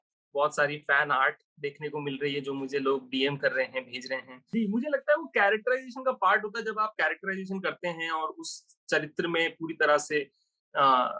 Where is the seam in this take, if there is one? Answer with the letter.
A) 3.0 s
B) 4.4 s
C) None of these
B